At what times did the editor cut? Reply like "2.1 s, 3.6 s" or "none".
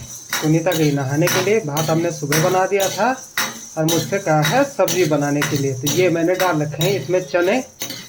none